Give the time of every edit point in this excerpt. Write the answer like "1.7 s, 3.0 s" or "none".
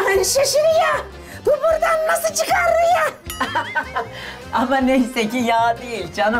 none